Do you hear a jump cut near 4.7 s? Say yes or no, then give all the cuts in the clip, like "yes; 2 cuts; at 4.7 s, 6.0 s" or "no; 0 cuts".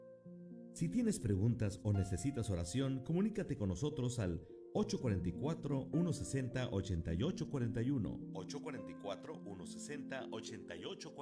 no; 0 cuts